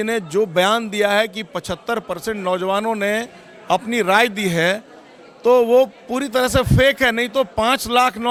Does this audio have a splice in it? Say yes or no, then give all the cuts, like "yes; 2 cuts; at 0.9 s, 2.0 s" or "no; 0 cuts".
no; 0 cuts